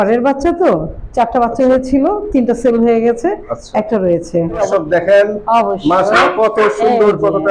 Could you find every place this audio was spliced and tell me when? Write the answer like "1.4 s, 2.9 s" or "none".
4.6 s